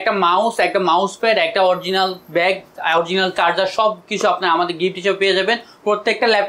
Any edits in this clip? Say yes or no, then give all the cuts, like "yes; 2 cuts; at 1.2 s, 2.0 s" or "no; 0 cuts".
no; 0 cuts